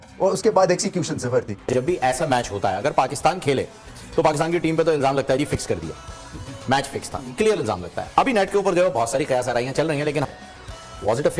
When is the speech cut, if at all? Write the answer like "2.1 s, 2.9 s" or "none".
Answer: 1.6 s, 10.3 s